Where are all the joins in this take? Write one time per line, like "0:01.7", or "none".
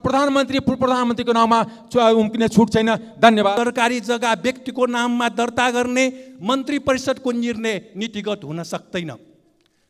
0:03.6